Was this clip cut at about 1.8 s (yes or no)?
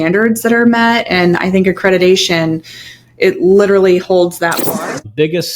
no